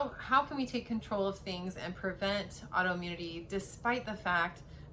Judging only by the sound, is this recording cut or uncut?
uncut